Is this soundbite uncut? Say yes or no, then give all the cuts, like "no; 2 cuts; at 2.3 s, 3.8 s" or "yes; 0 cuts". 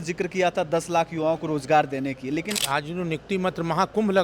no; 1 cut; at 2.6 s